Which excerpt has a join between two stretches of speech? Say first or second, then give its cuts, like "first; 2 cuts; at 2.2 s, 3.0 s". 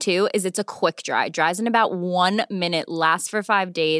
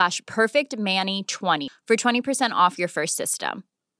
second; 1 cut; at 1.6 s